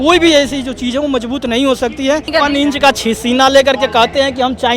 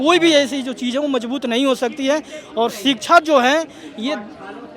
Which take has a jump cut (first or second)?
first